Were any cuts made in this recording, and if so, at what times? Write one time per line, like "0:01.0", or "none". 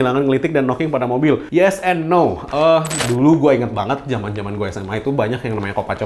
0:03.0